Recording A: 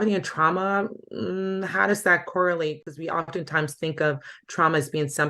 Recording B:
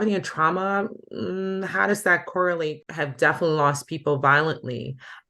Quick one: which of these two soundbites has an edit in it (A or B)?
B